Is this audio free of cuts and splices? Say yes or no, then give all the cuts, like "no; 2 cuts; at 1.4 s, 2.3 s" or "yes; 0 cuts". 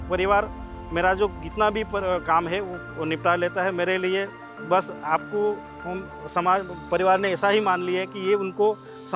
yes; 0 cuts